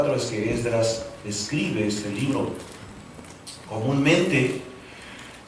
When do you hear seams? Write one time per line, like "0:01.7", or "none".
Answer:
0:01.7